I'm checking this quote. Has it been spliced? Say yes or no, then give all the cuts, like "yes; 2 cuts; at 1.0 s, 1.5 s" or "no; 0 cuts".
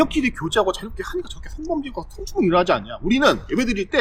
no; 0 cuts